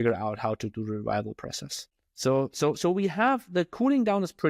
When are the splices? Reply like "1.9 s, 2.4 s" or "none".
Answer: 2.0 s